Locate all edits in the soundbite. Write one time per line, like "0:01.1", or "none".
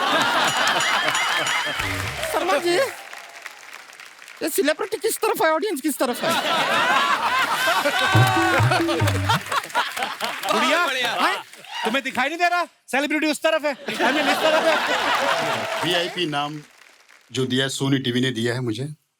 0:02.1
0:15.8